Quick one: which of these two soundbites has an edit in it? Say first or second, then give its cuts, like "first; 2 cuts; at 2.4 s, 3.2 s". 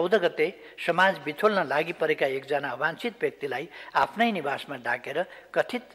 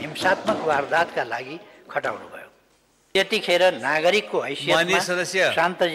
second; 1 cut; at 2.9 s